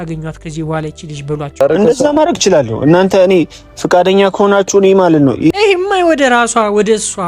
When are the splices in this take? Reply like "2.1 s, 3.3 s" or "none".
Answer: 1.6 s